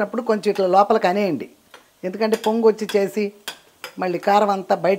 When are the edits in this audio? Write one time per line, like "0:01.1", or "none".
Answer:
none

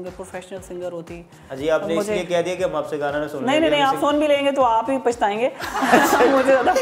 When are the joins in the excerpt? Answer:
none

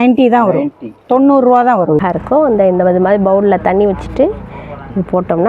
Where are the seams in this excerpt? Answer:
0:02.0

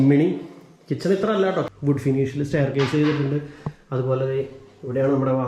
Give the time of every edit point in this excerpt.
0:01.7

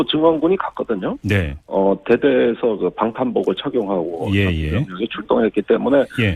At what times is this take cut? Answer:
0:05.0

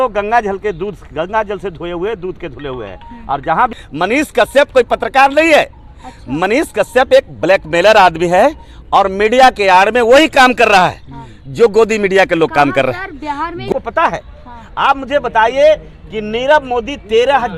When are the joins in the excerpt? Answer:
0:03.7
0:13.7

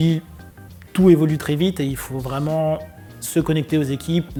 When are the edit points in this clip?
none

